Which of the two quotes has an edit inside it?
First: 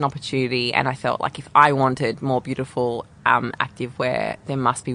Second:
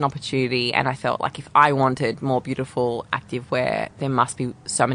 second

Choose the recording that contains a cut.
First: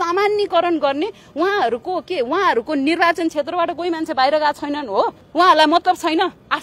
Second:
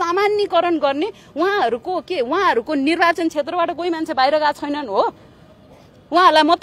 first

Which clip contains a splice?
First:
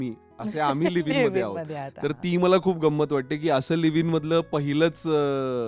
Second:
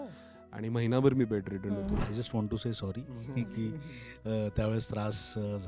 second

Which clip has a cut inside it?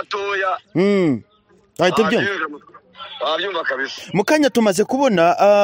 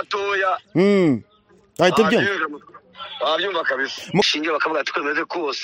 second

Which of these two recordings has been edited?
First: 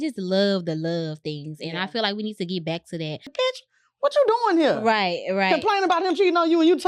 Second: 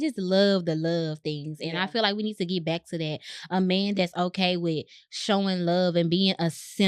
first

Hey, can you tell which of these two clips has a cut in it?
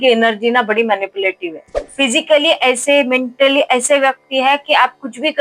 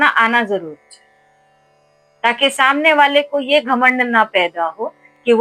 first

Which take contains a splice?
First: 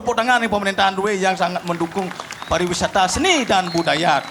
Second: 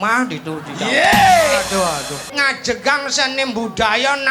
second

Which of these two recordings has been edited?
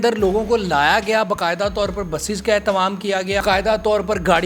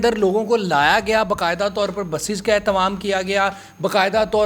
first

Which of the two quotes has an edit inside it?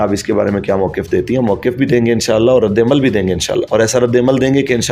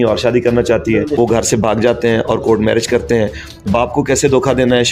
second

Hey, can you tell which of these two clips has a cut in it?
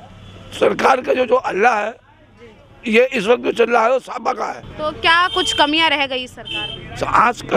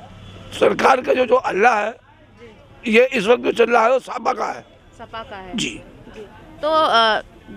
first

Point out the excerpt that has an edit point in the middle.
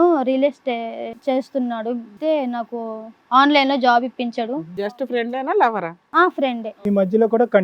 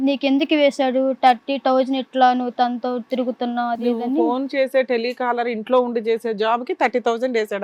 first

